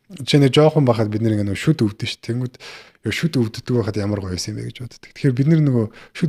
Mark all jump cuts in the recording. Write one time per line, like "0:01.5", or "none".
none

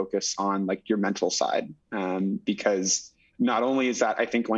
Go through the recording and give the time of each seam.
none

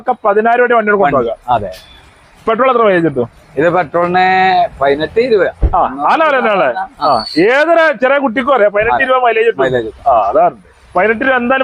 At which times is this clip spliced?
none

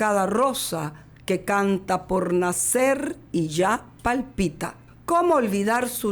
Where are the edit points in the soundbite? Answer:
0:04.9

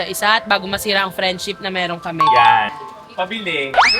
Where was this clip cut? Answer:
0:02.7

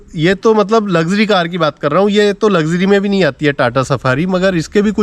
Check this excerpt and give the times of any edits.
none

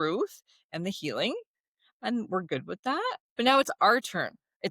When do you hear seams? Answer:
0:03.2

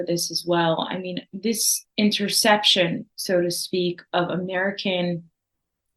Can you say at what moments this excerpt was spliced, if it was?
0:01.8

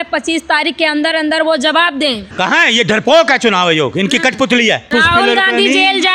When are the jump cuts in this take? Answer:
0:02.3
0:04.9

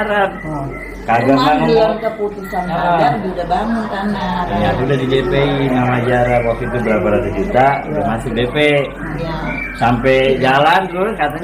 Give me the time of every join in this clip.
none

